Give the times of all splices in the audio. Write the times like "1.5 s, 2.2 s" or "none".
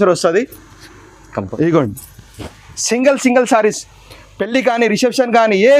1.5 s